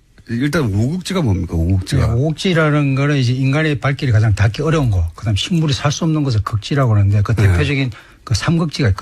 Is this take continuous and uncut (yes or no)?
no